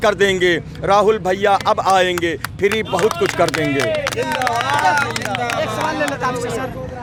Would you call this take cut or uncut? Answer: uncut